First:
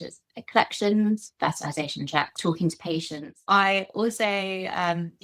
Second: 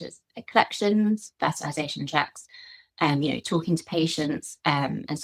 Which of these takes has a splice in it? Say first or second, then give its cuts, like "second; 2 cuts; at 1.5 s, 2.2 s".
first; 2 cuts; at 2.4 s, 3.4 s